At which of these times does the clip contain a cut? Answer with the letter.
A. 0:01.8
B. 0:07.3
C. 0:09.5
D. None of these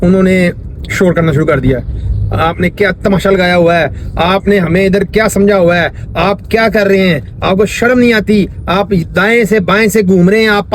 D